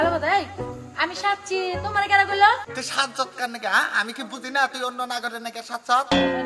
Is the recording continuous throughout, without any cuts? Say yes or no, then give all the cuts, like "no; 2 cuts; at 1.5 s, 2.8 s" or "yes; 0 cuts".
no; 1 cut; at 2.7 s